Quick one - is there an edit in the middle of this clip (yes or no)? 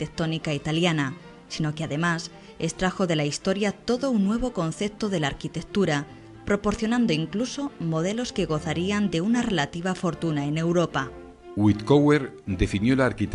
yes